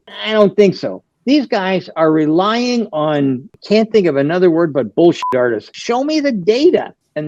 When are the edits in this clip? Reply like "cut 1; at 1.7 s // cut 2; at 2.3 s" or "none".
cut 1; at 5.7 s